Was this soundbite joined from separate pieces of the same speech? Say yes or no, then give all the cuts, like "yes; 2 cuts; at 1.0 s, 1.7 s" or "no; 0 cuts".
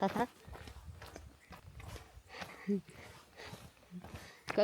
yes; 1 cut; at 1.6 s